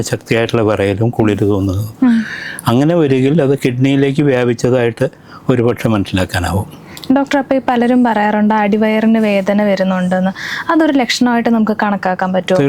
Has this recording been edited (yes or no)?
no